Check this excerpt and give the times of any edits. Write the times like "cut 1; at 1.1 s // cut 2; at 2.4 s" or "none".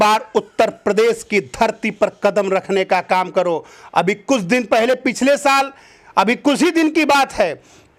none